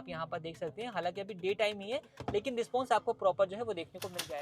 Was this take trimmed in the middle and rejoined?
no; 0 cuts

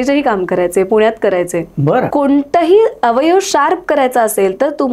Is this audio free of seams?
no; 1 cut; at 2.1 s

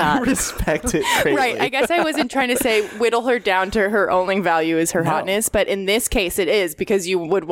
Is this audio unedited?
yes; 0 cuts

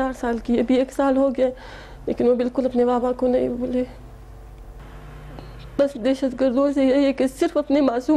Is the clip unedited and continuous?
yes; 0 cuts

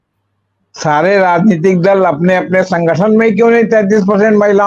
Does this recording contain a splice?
no; 0 cuts

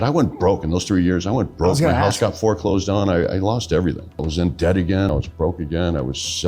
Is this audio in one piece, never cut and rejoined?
no; 2 cuts; at 4.2 s, 5.1 s

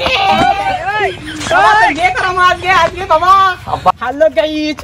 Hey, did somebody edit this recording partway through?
yes; 1 cut; at 3.9 s

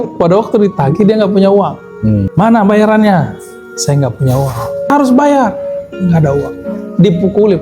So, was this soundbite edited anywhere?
yes; 2 cuts; at 2.3 s, 4.9 s

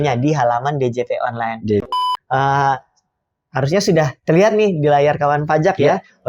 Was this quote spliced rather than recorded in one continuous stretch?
yes; 1 cut; at 2.0 s

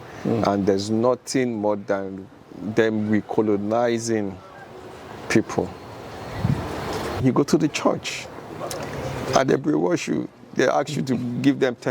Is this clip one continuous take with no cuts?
no; 1 cut; at 7.2 s

